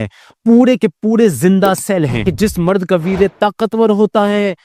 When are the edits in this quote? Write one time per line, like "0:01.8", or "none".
0:02.2